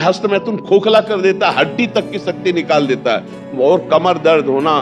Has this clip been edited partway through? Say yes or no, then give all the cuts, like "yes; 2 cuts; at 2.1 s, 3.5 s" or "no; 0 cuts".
no; 0 cuts